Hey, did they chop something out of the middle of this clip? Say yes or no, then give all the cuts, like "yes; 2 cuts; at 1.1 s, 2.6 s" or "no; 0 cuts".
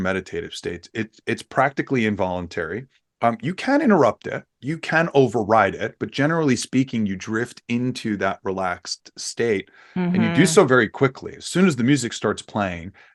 no; 0 cuts